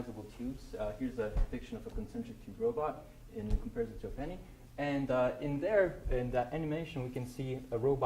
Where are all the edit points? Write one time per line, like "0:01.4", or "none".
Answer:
0:06.6